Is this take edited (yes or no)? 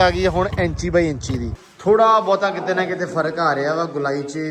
yes